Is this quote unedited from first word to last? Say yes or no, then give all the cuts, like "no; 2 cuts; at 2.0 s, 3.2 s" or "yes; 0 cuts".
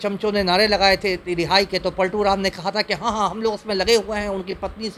yes; 0 cuts